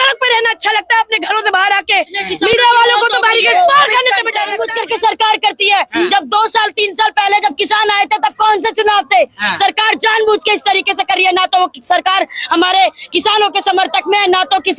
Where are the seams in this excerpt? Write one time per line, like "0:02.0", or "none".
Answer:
0:04.6

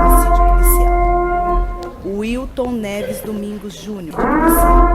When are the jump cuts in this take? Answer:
0:01.8
0:03.7

